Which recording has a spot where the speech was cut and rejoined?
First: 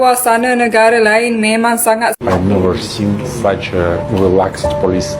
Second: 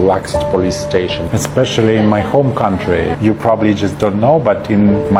first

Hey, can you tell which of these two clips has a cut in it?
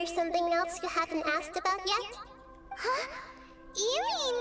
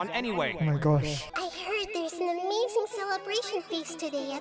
second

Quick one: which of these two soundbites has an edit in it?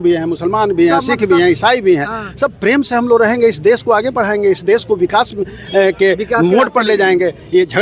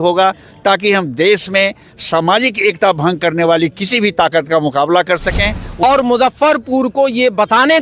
second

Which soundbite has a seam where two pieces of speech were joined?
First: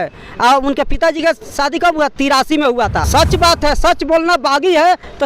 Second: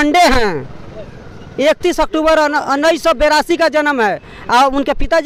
first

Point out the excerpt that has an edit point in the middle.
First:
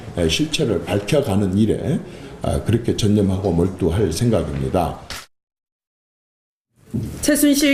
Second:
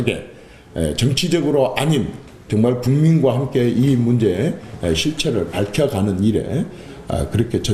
second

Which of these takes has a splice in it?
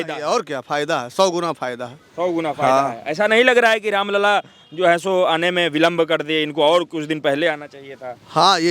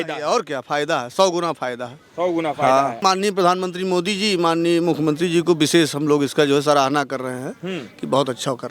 second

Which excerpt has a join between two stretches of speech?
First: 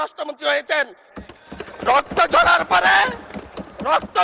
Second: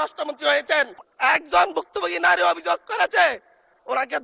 second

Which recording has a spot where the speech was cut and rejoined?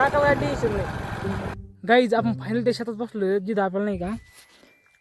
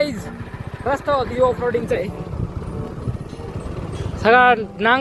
first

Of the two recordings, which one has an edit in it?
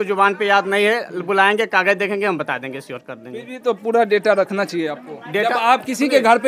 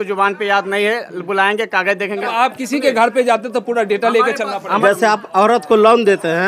second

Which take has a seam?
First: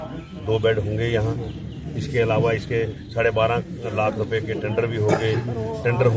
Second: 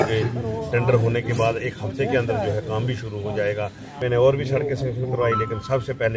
second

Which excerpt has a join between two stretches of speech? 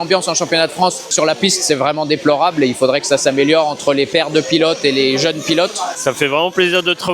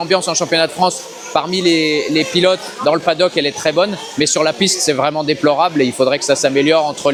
first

